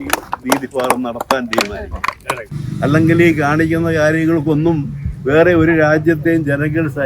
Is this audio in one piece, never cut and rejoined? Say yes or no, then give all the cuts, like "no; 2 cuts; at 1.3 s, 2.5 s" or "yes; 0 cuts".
no; 1 cut; at 2.5 s